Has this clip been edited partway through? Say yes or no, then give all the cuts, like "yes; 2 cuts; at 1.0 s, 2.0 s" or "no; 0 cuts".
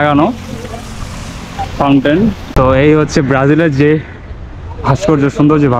yes; 1 cut; at 2.4 s